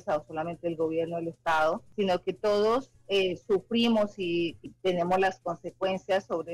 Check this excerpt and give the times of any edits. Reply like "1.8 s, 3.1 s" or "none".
1.9 s, 4.7 s